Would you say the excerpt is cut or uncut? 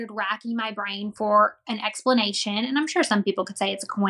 uncut